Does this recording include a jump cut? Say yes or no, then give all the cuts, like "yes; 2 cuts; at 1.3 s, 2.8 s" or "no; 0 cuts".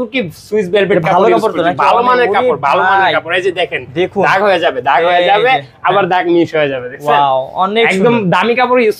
no; 0 cuts